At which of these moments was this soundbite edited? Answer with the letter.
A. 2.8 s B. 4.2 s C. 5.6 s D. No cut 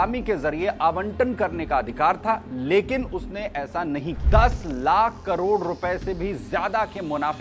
B